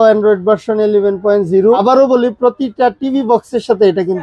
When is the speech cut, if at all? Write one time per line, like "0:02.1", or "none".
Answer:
0:01.8